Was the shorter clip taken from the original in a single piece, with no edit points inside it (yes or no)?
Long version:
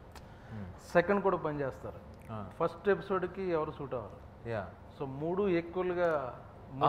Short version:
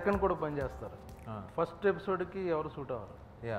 yes